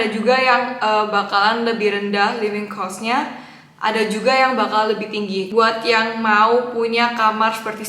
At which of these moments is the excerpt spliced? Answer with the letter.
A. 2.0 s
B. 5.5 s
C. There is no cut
B